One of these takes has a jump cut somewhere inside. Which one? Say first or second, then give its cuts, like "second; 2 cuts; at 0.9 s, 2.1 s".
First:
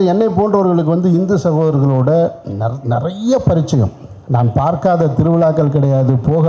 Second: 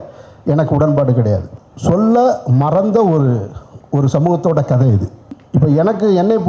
second; 2 cuts; at 1.5 s, 5.2 s